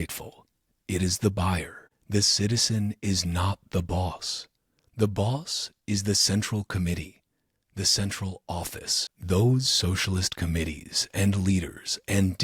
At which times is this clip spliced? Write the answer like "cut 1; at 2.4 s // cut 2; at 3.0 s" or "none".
none